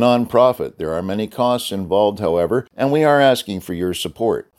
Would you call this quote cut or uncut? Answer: cut